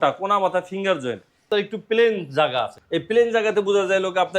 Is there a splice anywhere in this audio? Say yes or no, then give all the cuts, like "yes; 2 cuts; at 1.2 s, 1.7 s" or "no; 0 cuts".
yes; 2 cuts; at 1.5 s, 2.8 s